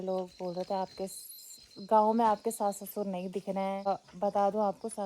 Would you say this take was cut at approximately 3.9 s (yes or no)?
yes